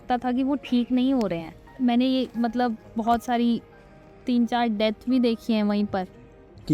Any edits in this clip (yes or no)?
yes